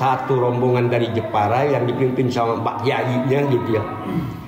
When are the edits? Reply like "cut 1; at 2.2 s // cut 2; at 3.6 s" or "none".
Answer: none